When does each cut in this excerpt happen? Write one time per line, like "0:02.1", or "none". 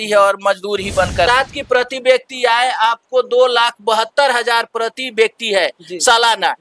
0:01.3